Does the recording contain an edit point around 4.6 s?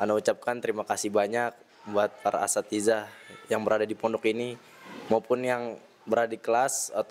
no; 0 cuts

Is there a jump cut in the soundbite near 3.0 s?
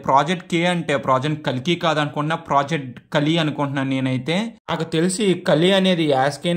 no; 1 cut; at 4.6 s

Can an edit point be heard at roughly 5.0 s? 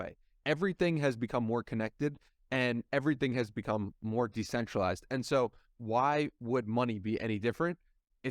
no; 0 cuts

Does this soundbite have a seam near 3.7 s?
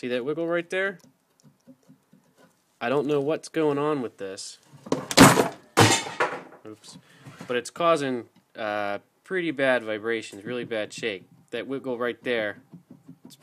no; 1 cut; at 10.5 s

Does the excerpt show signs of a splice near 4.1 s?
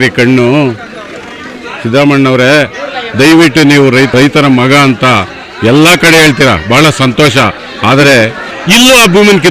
yes; 2 cuts; at 4.1 s, 8.5 s

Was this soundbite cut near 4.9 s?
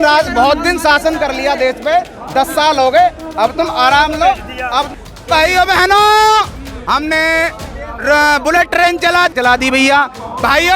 yes; 2 cuts; at 4.9 s, 9.3 s

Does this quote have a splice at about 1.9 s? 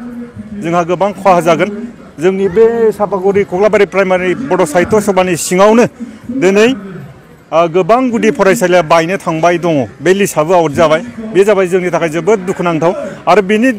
yes; 1 cut; at 1.9 s

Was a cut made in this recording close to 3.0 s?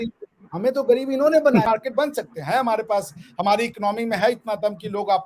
no; 1 cut; at 1.6 s

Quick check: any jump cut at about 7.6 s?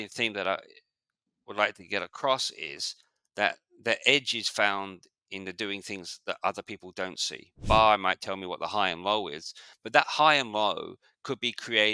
yes; 1 cut; at 7.6 s

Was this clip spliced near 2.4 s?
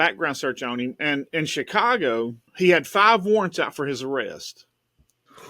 yes; 1 cut; at 2.4 s

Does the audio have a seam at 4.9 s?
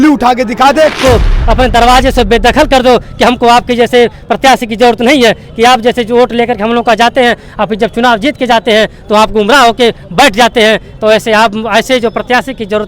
no; 1 cut; at 1.0 s

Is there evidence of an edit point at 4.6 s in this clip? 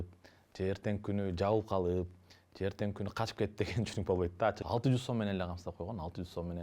yes; 1 cut; at 4.6 s

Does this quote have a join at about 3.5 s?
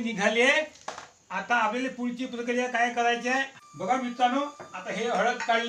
yes; 1 cut; at 3.5 s

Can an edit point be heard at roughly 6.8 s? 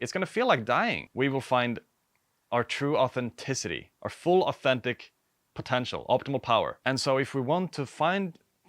yes; 2 cuts; at 1.0 s, 6.8 s

